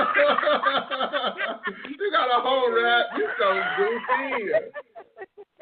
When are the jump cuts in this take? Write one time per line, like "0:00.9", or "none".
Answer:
none